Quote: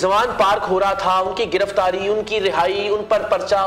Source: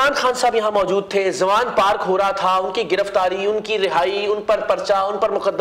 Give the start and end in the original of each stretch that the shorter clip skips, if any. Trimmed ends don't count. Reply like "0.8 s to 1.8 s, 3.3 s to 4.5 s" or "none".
none